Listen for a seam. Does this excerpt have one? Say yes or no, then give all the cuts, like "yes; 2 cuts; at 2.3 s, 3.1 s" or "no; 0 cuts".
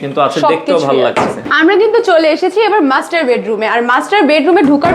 yes; 1 cut; at 1.4 s